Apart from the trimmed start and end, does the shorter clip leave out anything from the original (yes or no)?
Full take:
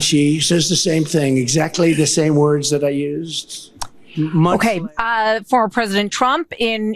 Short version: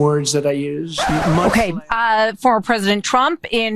yes